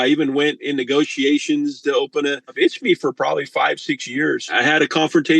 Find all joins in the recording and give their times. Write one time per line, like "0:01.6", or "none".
0:02.5
0:04.5